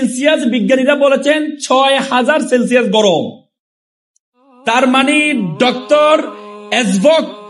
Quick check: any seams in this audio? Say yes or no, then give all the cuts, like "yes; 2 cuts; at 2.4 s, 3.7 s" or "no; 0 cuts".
no; 0 cuts